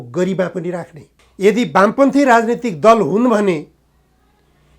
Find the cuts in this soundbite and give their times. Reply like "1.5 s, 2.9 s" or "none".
1.2 s